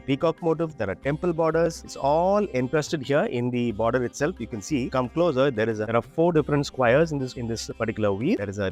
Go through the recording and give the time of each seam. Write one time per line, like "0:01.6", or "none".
none